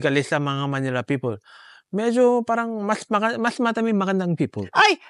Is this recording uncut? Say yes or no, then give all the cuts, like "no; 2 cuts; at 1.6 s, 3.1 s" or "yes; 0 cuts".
yes; 0 cuts